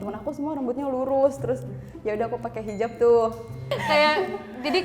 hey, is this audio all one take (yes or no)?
no